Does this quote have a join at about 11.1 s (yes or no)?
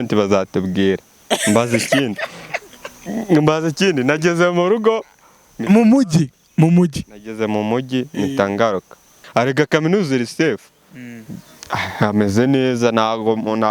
no